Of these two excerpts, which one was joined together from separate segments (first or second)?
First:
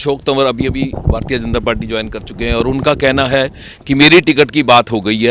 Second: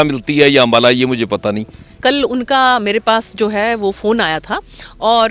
second